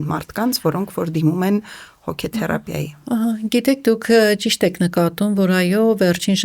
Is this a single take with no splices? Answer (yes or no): yes